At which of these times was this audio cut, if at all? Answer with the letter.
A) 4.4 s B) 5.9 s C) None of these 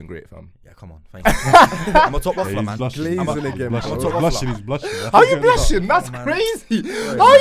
C